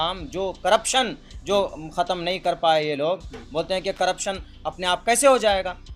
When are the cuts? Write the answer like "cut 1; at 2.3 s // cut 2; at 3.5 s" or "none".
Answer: none